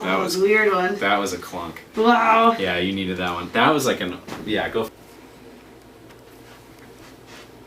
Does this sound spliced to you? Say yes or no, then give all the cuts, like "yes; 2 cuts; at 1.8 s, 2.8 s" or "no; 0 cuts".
yes; 1 cut; at 4.9 s